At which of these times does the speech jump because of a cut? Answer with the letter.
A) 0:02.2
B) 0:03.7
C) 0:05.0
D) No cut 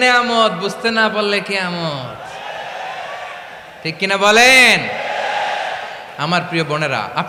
D